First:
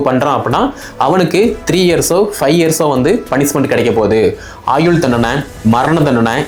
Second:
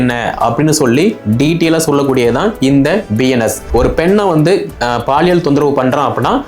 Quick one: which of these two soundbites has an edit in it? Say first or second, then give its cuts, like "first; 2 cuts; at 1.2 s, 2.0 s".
second; 1 cut; at 3.6 s